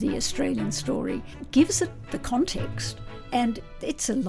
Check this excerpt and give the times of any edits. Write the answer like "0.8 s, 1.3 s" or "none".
1.3 s, 3.2 s

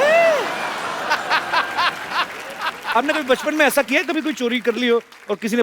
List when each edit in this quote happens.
2.9 s

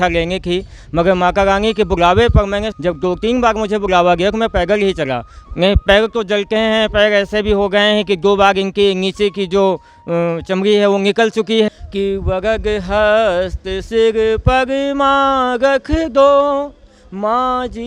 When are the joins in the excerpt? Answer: 2.7 s, 5.3 s, 11.7 s

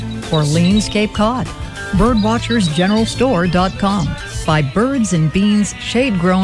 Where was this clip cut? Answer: none

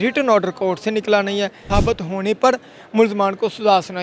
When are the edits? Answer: 1.6 s

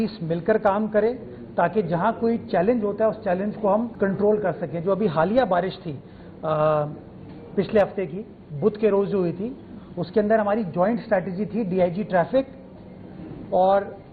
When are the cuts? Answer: none

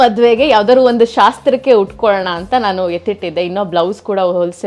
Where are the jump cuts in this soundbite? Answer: none

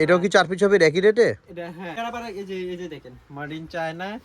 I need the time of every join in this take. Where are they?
1.9 s

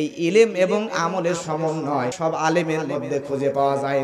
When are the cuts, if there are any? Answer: 2.2 s

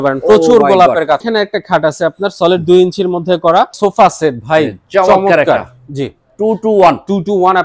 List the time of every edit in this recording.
1.3 s, 3.7 s

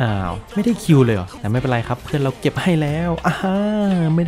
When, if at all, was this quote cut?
1.3 s

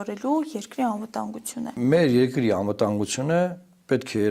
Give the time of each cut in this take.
1.7 s

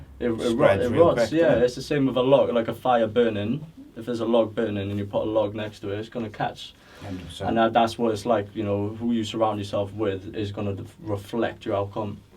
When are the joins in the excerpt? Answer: none

